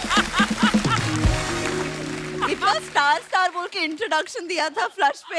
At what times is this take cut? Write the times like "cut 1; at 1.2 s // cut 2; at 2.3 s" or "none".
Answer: none